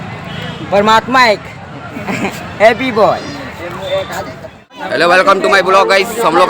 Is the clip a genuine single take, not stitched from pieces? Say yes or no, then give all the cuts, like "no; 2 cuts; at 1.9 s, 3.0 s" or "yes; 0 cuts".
no; 1 cut; at 4.8 s